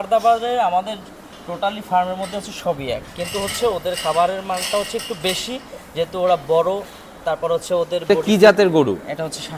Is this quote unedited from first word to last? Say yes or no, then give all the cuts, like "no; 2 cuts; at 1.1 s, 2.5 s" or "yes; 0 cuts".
no; 1 cut; at 8.1 s